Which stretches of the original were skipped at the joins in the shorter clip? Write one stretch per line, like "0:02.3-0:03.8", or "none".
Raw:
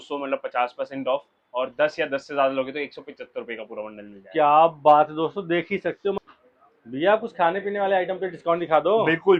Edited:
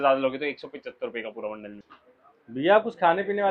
0:04.2-0:06.3